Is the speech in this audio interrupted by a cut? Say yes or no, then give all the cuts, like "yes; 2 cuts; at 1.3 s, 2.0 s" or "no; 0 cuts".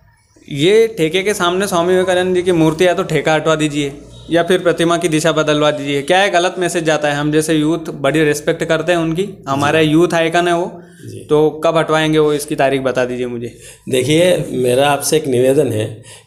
no; 0 cuts